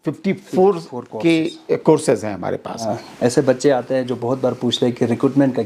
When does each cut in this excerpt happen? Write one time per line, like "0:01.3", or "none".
0:03.0